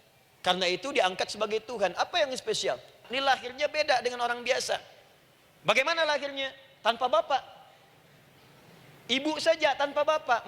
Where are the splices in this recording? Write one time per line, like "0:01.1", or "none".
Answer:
0:03.1